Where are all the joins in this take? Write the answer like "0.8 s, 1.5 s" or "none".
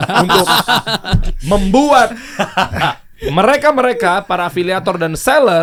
none

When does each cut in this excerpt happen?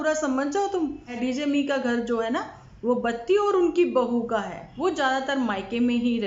1.1 s, 4.6 s

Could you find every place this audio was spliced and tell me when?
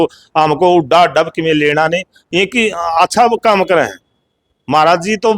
2.2 s

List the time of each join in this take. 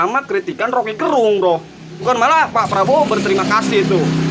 2.0 s

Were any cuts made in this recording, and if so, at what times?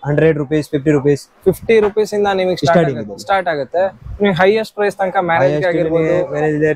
none

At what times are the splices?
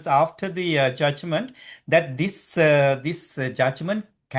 none

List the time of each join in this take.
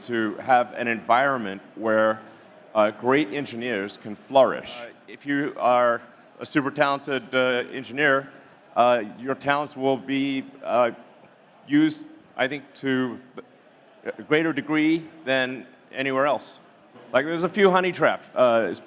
5.1 s, 17.0 s

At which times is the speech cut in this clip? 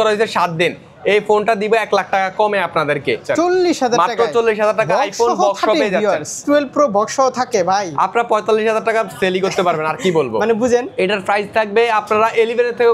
3.2 s, 6.4 s, 10.9 s

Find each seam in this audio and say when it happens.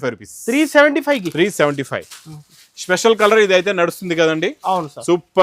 none

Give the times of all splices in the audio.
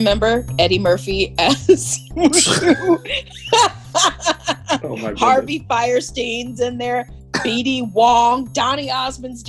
none

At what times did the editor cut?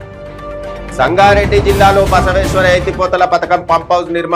1.0 s

